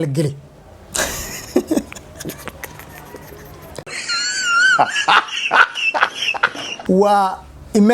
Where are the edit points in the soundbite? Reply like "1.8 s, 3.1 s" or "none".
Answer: 6.7 s